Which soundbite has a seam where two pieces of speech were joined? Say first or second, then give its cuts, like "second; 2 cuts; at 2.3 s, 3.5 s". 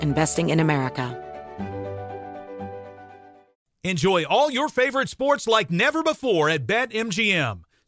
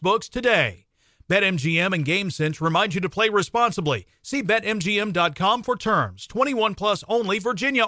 first; 1 cut; at 1.1 s